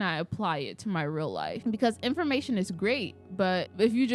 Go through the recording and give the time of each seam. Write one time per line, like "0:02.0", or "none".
0:01.6